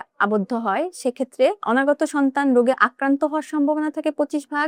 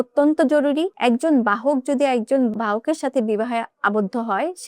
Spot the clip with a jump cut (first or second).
second